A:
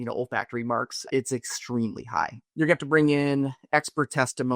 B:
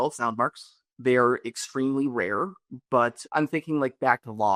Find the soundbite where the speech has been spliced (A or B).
A